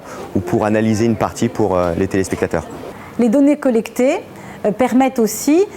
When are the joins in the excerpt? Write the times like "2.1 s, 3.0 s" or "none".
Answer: 3.6 s